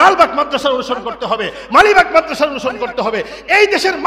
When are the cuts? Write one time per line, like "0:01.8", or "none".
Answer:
none

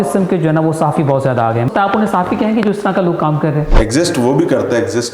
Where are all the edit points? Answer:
0:01.7
0:03.7

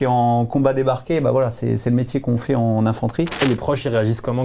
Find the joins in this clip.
0:03.4

